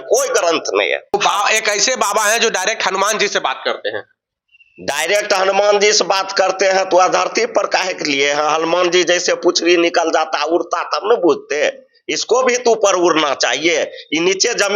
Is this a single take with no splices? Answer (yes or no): no